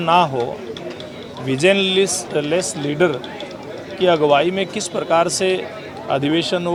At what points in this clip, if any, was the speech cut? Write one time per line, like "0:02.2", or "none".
none